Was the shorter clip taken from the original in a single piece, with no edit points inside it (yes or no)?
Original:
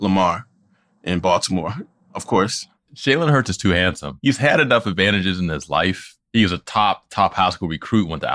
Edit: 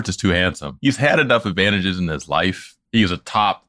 yes